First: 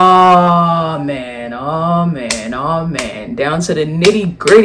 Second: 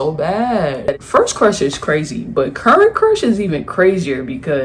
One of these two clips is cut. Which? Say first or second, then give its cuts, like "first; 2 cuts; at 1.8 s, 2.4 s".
second; 1 cut; at 1.0 s